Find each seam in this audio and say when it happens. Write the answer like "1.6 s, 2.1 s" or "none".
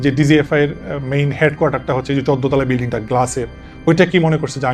none